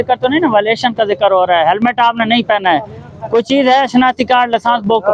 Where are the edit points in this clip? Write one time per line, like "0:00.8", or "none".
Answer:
none